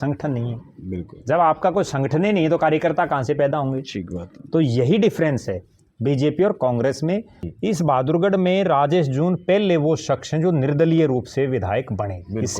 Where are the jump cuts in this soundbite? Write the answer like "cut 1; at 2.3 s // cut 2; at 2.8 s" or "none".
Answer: cut 1; at 7.4 s

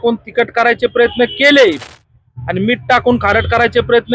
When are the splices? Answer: none

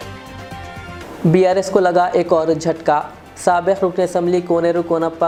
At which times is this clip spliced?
none

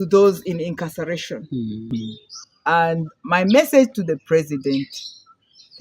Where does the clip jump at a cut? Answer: cut 1; at 1.8 s

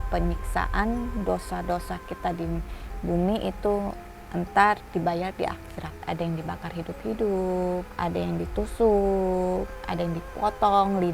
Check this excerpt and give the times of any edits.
cut 1; at 6.0 s // cut 2; at 7.9 s

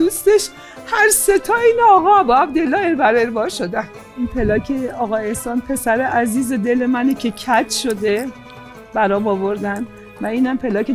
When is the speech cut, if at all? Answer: cut 1; at 4.1 s

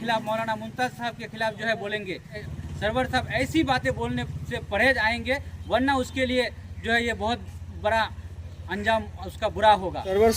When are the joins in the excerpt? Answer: cut 1; at 2.5 s

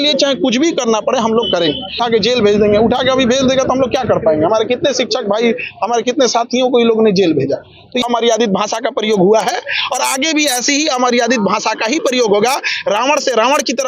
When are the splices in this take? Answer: cut 1; at 2.0 s // cut 2; at 8.0 s

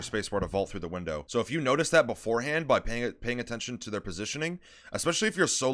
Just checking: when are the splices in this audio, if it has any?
cut 1; at 1.2 s

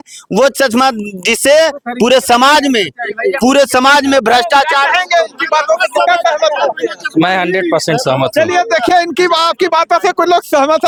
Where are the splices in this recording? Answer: none

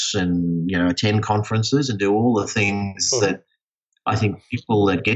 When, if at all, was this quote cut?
none

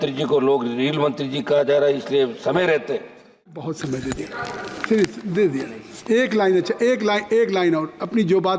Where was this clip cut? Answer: cut 1; at 3.7 s

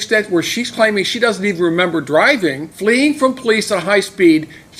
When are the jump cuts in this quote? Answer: cut 1; at 2.7 s

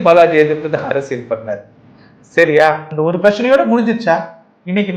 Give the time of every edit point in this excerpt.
cut 1; at 2.9 s

